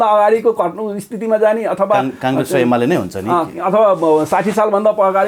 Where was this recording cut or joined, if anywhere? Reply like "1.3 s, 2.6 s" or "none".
none